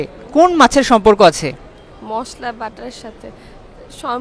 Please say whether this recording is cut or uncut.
uncut